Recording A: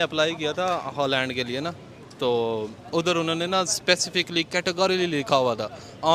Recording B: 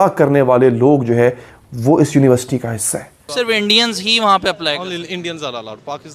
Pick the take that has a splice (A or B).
B